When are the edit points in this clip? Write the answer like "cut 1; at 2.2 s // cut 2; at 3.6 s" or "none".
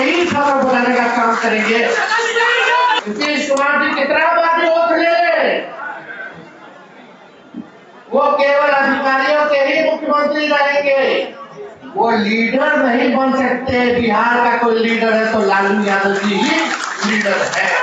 cut 1; at 3.0 s